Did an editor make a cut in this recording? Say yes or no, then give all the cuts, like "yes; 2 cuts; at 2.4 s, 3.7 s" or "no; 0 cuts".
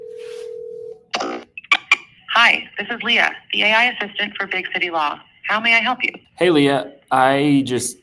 yes; 2 cuts; at 2.1 s, 6.2 s